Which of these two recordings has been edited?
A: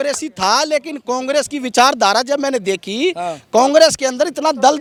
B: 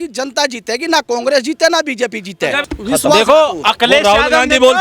B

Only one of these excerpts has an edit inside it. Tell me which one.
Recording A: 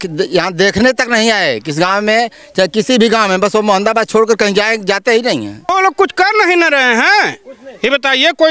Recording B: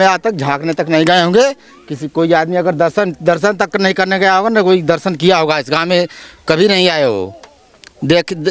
A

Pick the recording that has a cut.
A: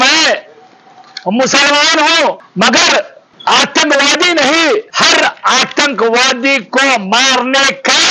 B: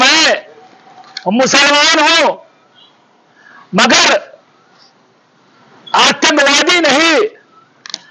A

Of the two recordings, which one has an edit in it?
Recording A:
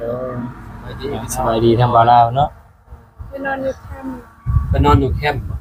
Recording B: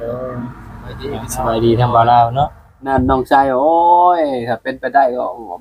B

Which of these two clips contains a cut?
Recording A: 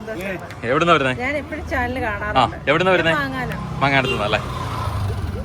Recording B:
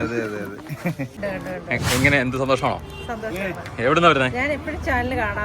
B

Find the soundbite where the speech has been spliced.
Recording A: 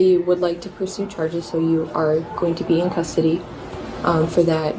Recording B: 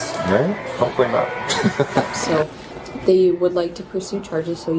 B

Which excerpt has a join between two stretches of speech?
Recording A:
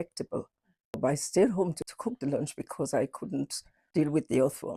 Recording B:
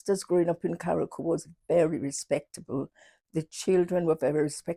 A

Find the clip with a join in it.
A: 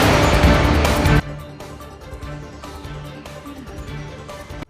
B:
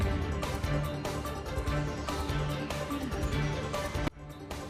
A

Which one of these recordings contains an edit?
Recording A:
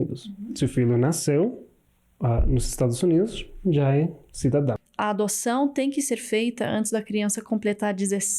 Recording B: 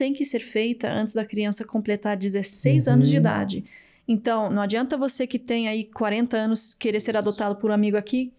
A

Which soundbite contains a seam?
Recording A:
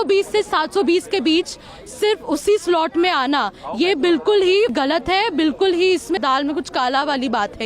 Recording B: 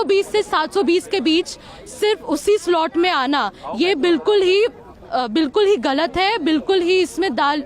A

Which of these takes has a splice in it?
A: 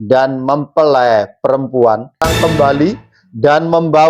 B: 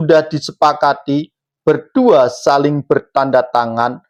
A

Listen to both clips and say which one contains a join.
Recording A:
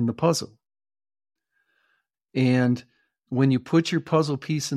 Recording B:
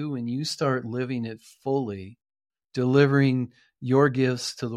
A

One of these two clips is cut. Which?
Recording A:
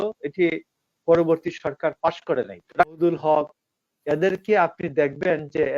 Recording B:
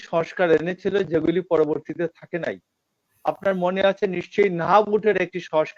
A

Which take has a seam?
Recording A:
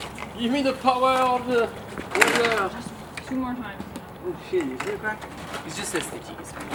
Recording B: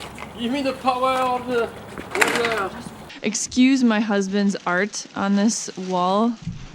B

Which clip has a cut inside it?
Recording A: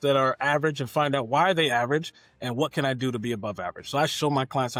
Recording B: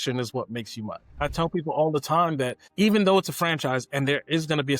B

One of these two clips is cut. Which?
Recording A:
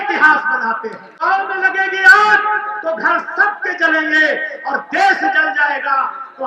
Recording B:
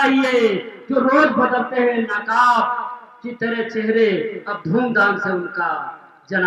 A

